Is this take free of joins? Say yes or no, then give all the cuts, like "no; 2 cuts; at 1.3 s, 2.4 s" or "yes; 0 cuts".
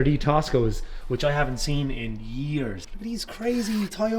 no; 1 cut; at 2.9 s